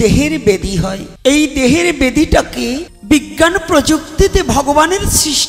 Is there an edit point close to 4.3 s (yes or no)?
no